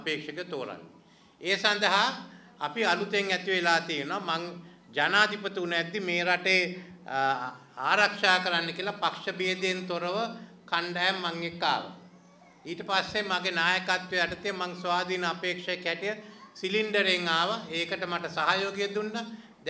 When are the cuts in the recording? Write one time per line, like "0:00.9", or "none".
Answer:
none

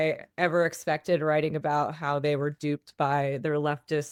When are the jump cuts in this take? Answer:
none

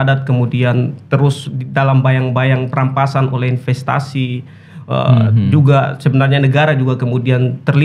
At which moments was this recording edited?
none

